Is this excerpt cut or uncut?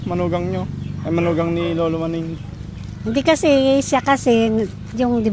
uncut